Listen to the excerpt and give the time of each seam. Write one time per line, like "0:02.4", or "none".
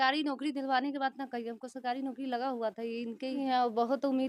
0:03.4